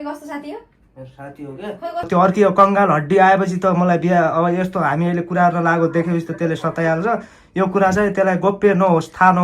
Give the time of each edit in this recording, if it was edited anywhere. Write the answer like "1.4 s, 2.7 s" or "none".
2.1 s